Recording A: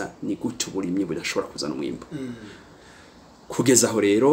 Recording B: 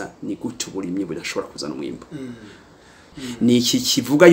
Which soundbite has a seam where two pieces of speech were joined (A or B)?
B